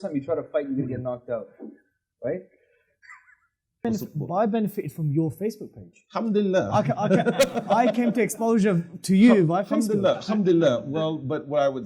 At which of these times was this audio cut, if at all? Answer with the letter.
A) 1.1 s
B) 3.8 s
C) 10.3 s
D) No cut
B